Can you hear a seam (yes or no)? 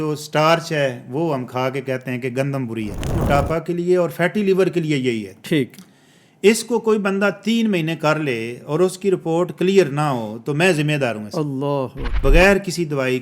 yes